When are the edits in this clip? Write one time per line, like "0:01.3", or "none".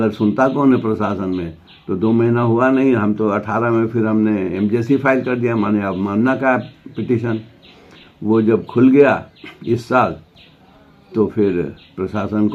none